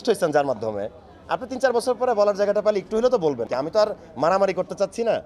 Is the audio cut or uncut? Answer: cut